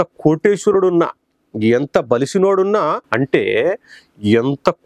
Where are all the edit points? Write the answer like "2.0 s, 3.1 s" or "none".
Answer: 3.0 s